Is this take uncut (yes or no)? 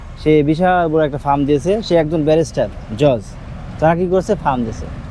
yes